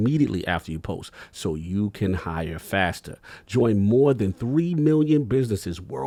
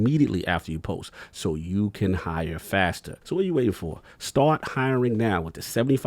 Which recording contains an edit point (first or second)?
second